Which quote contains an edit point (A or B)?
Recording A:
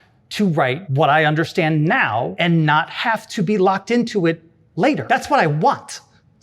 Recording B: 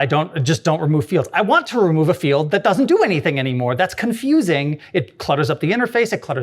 A